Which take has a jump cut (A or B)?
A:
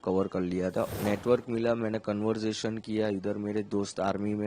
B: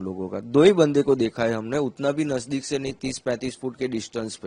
A